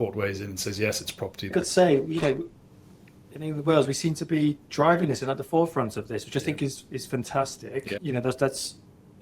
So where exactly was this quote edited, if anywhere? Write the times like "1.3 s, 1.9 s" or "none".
1.5 s, 8.0 s